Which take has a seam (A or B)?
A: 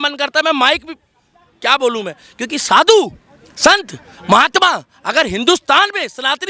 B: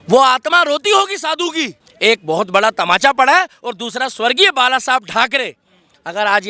B